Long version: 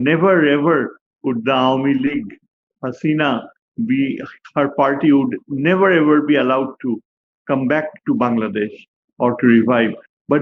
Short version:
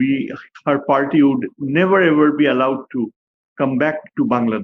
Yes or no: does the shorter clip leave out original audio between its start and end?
no